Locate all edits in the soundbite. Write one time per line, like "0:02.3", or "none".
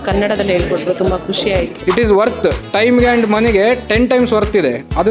0:01.7